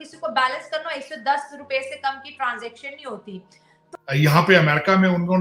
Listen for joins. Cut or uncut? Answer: cut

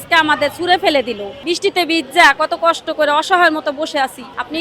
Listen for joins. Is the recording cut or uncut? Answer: cut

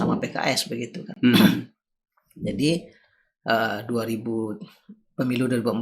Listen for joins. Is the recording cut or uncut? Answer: uncut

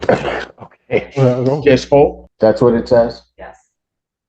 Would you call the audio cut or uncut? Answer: cut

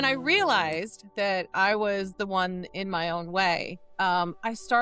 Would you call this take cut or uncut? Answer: uncut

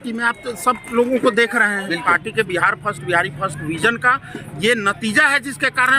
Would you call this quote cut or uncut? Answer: cut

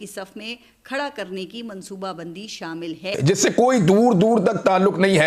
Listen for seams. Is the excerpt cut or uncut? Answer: cut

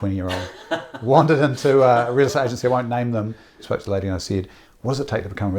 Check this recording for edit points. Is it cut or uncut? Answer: cut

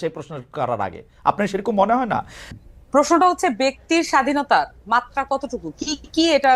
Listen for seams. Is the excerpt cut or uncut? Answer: cut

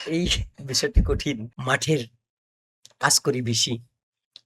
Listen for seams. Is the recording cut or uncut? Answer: cut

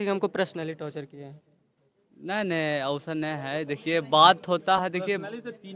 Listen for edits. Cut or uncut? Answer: uncut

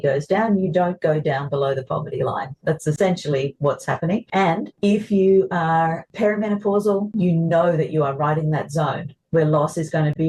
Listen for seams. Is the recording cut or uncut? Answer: cut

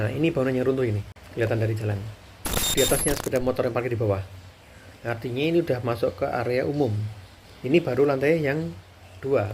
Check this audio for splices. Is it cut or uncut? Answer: cut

